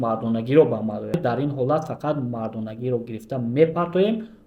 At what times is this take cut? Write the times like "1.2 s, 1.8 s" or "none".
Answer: 1.2 s